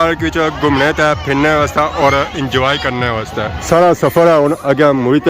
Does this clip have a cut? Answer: no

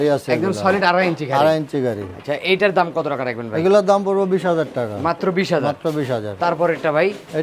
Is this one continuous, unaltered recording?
yes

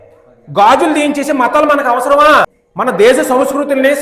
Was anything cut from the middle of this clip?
yes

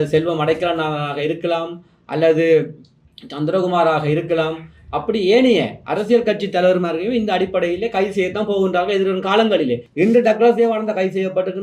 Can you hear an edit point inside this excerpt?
yes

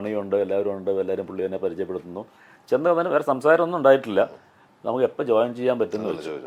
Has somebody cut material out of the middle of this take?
no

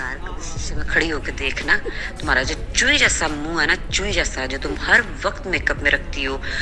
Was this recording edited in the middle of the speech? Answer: no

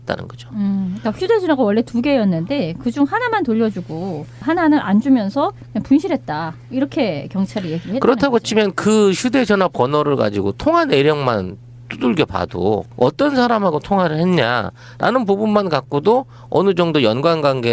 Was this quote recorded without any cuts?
yes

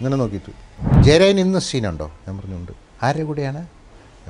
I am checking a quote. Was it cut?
yes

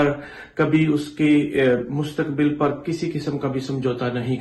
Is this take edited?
no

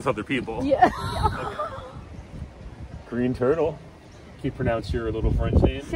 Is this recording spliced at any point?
yes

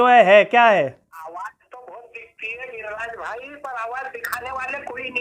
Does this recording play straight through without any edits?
no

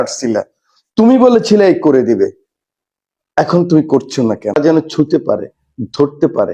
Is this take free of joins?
no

